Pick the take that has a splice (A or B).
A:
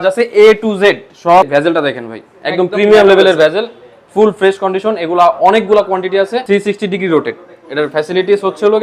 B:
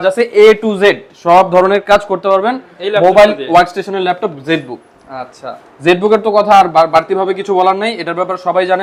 A